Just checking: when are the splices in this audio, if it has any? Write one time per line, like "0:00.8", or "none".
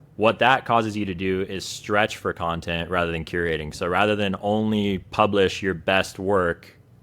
none